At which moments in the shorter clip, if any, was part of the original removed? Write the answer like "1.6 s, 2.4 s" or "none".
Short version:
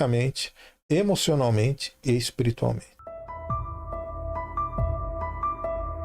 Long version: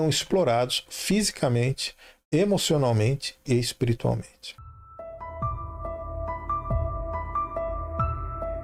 2.9 s